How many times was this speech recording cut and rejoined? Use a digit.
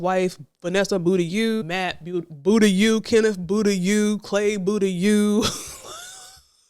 1